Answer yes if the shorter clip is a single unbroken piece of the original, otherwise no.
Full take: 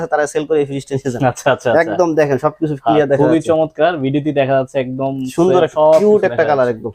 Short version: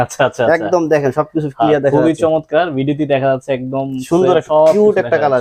yes